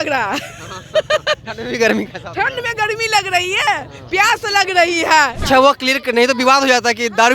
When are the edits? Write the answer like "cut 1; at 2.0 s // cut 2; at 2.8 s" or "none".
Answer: cut 1; at 5.4 s